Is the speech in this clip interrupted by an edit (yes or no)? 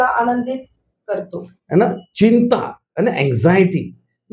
yes